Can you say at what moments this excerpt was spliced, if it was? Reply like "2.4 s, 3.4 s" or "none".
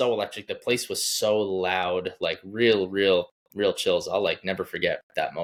none